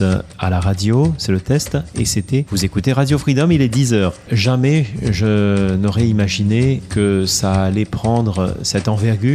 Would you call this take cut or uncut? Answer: cut